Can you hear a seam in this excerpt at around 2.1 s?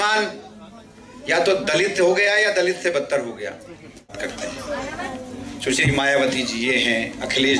no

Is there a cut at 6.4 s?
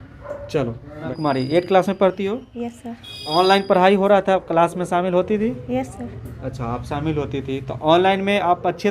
no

